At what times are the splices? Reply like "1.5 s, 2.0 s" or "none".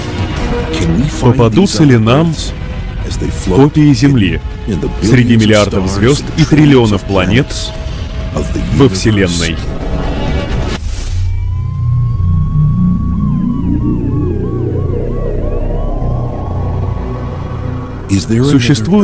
13.8 s